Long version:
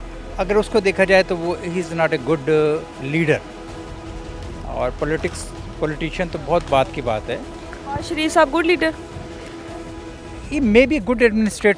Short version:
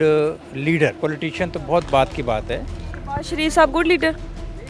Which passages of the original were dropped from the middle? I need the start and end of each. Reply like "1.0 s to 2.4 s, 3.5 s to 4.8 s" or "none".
3.4 s to 5.8 s